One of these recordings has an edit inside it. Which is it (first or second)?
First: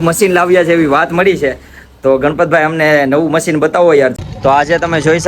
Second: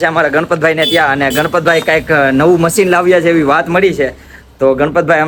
first